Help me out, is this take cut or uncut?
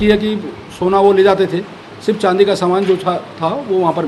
uncut